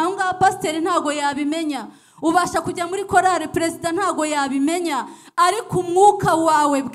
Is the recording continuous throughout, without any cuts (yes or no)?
yes